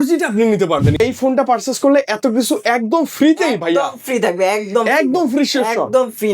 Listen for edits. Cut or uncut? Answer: cut